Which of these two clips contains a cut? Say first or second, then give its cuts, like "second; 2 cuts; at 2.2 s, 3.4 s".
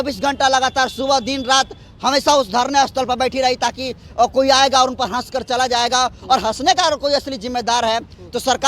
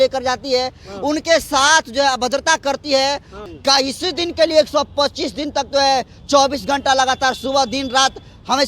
second; 1 cut; at 3.3 s